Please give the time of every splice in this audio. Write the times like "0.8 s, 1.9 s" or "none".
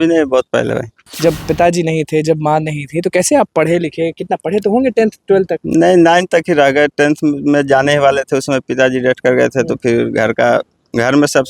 1.1 s